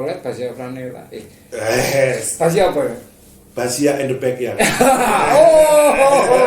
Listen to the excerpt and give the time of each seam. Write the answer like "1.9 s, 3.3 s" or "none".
none